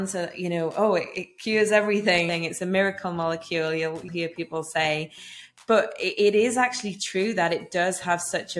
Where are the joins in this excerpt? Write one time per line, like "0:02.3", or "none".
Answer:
0:02.3
0:04.1